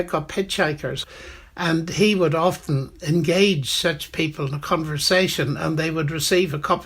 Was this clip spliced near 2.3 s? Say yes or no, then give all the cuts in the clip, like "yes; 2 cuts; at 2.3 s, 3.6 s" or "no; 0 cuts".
no; 1 cut; at 1.0 s